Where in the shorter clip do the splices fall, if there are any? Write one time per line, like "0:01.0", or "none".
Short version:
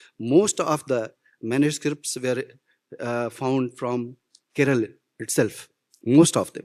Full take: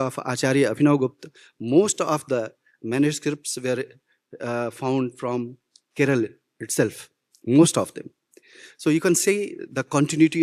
none